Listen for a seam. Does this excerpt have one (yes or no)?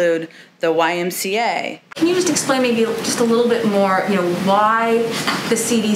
yes